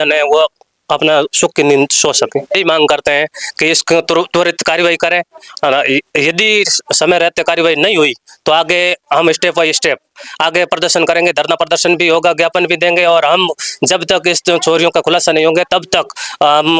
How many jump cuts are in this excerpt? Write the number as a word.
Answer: zero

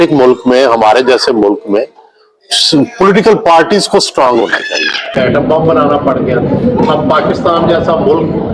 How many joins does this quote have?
one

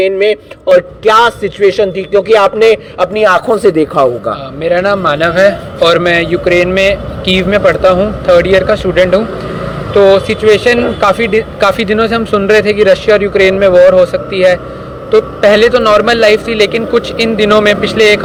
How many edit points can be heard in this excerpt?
zero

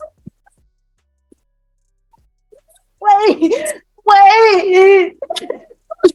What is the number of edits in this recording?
one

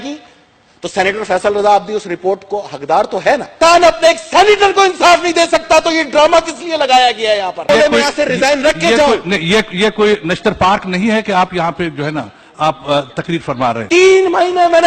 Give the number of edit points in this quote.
three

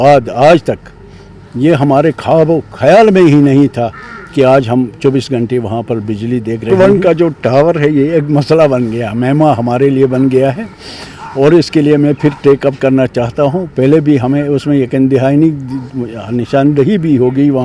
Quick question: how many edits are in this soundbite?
one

